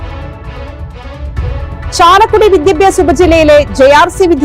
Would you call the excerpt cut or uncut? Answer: uncut